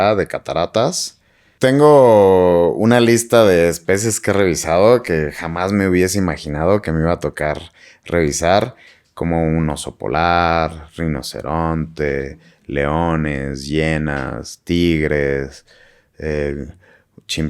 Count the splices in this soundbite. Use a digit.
1